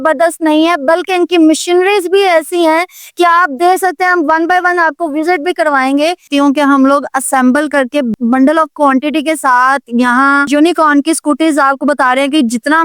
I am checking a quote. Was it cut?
yes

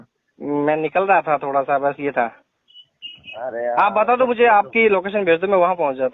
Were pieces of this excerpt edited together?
no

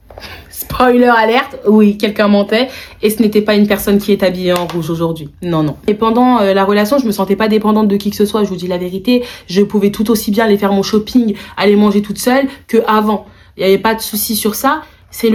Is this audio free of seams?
yes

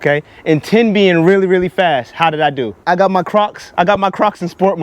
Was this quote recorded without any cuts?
no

